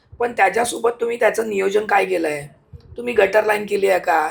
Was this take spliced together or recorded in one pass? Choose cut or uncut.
uncut